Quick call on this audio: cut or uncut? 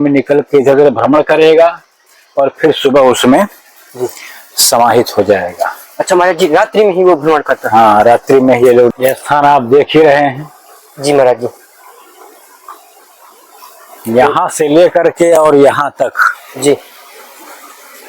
cut